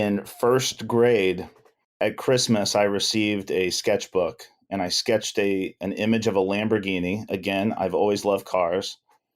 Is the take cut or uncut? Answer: cut